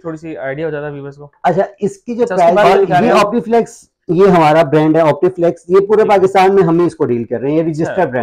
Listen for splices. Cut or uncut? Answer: cut